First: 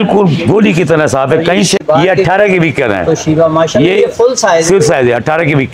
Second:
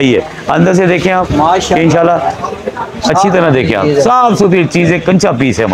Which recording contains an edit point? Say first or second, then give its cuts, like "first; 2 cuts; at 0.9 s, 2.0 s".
first; 1 cut; at 1.8 s